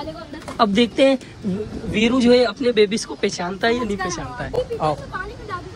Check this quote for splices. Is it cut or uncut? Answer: cut